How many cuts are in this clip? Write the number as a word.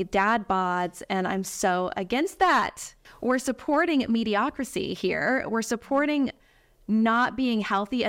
zero